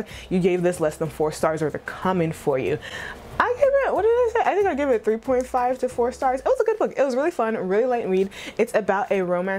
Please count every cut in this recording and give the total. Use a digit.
0